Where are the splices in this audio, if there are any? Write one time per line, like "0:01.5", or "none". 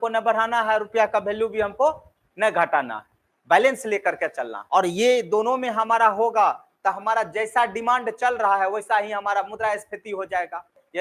0:04.5